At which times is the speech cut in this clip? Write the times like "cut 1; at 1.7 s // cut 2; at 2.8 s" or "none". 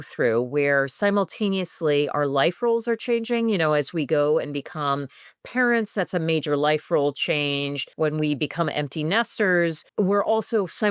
cut 1; at 7.8 s // cut 2; at 9.8 s